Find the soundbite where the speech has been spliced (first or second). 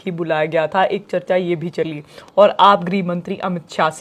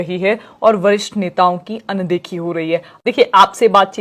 second